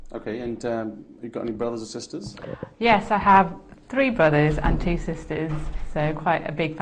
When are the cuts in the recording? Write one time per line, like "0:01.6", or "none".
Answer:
none